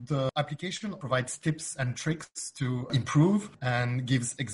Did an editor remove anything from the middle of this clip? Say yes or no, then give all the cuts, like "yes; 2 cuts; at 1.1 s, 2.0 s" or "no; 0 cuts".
yes; 1 cut; at 1.0 s